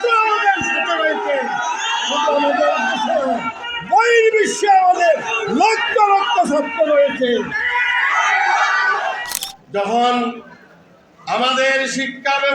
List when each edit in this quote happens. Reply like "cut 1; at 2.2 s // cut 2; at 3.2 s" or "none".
cut 1; at 9.2 s